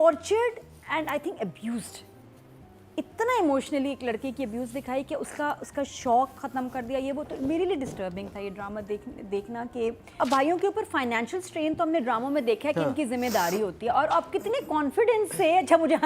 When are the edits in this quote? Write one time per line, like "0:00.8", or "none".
0:10.0